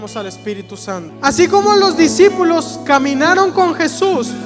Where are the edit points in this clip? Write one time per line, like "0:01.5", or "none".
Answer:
0:01.1